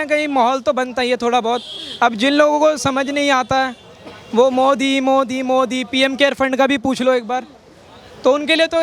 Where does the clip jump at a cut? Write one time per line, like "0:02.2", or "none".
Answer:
none